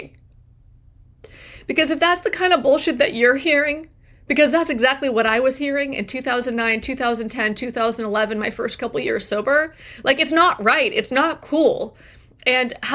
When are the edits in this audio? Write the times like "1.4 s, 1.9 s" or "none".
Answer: none